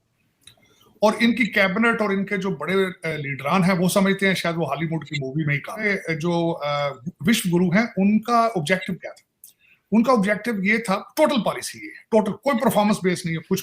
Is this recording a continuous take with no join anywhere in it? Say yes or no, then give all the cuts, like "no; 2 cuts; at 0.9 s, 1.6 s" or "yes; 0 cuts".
no; 1 cut; at 5.8 s